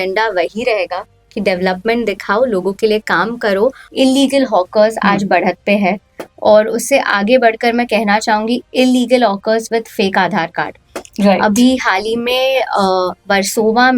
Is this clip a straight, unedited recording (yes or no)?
no